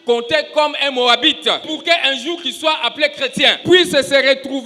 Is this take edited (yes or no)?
yes